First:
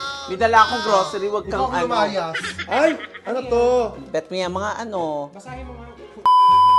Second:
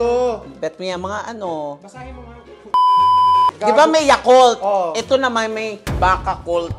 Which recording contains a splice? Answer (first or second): first